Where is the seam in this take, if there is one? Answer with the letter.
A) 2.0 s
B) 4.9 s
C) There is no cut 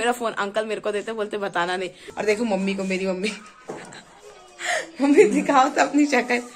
A